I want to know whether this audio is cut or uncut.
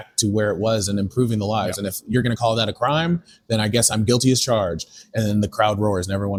uncut